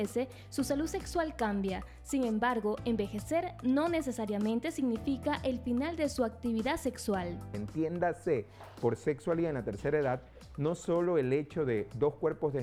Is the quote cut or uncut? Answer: uncut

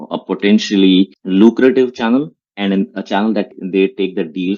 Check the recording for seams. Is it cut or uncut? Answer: cut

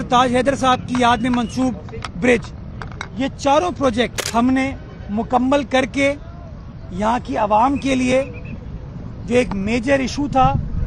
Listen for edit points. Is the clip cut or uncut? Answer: cut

